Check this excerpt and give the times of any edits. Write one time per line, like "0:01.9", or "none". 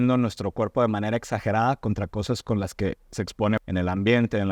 0:03.6